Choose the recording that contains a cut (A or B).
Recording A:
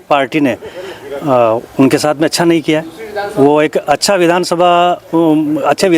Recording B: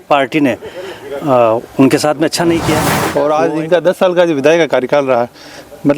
B